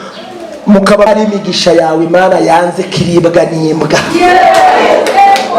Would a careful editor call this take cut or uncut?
cut